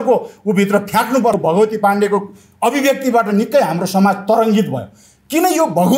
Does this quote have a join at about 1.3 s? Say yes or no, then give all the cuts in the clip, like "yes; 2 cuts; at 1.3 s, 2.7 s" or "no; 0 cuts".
yes; 1 cut; at 1.3 s